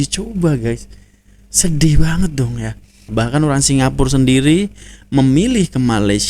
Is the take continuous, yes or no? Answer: no